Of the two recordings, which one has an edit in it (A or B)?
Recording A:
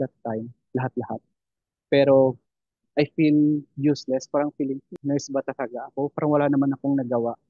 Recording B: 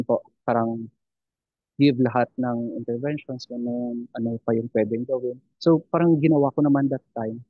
A